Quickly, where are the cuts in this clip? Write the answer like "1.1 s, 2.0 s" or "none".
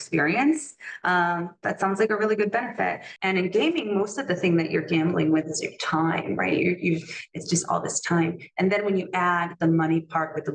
3.1 s